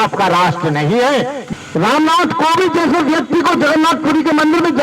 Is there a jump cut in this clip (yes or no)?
yes